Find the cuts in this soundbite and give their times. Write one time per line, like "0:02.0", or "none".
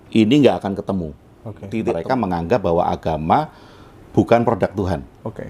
0:01.7